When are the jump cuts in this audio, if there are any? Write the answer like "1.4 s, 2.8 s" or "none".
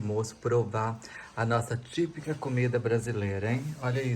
none